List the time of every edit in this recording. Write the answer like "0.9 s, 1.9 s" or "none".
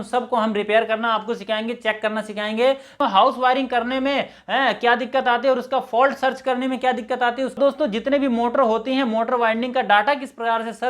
2.9 s, 7.6 s